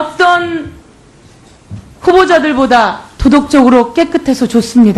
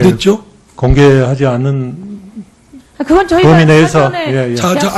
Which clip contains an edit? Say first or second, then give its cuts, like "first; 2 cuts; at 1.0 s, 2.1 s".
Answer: first; 1 cut; at 3.0 s